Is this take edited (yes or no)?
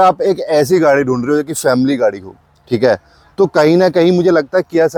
no